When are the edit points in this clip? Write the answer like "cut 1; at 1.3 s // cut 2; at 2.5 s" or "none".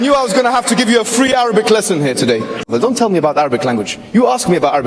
cut 1; at 2.6 s